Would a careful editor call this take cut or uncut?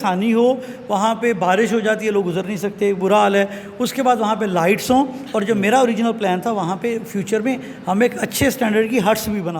uncut